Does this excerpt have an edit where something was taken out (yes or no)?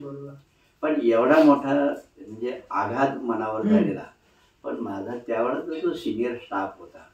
no